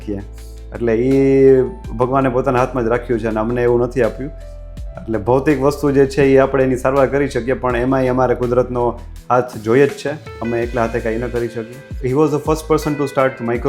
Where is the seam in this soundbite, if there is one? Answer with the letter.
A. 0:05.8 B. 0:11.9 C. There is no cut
B